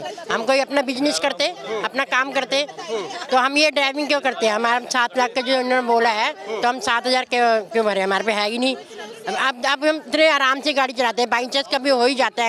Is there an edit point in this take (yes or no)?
no